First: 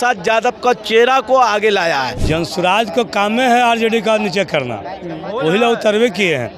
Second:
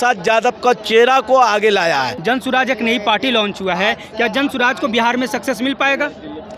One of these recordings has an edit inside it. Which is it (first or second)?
first